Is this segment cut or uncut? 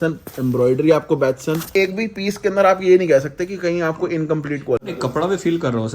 cut